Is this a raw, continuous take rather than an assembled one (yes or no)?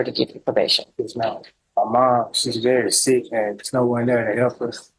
no